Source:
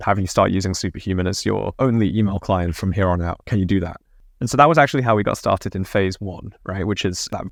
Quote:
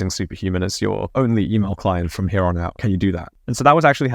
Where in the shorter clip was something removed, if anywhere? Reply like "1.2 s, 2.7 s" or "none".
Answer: 2.9 s